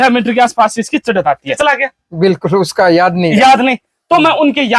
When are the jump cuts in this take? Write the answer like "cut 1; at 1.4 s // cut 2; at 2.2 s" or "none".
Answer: cut 1; at 1.6 s

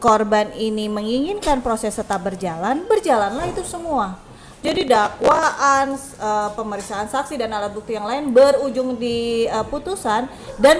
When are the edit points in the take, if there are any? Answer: none

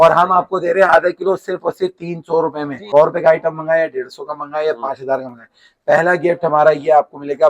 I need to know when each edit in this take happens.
cut 1; at 2.8 s

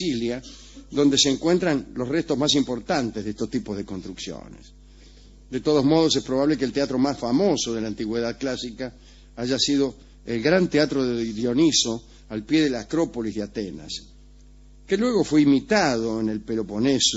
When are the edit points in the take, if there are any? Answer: cut 1; at 12.6 s

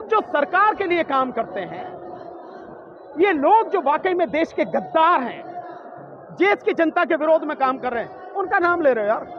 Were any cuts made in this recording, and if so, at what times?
none

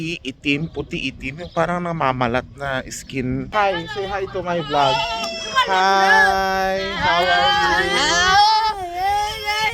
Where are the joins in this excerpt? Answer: cut 1; at 3.5 s

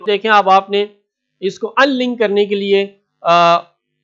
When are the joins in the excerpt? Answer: none

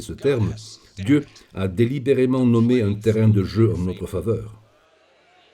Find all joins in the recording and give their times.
cut 1; at 4.6 s

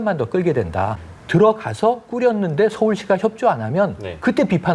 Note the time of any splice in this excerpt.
cut 1; at 1.0 s

